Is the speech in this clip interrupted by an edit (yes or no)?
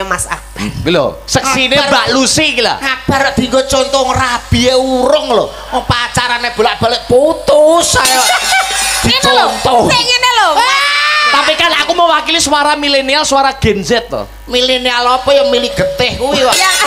no